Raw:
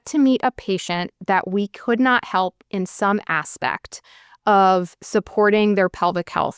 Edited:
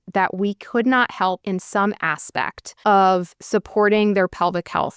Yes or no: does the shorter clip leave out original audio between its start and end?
yes